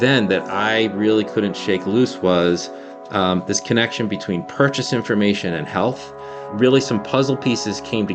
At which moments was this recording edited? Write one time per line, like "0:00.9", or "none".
none